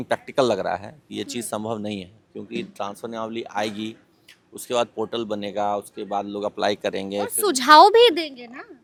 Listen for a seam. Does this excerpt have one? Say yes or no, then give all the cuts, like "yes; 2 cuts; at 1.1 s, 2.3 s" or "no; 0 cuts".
no; 0 cuts